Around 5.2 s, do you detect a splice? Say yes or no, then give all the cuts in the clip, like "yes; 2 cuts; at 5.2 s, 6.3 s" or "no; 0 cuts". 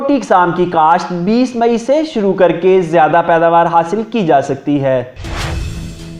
yes; 1 cut; at 5.2 s